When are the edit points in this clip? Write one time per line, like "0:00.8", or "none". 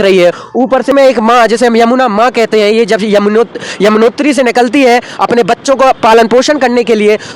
0:00.9